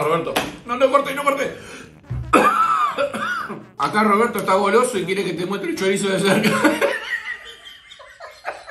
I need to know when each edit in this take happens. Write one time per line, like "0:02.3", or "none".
none